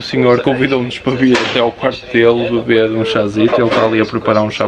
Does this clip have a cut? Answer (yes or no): no